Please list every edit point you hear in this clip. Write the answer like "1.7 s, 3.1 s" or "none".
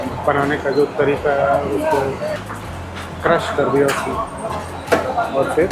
2.5 s